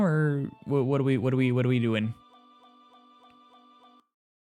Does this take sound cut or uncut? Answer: uncut